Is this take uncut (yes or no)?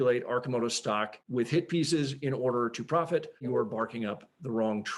no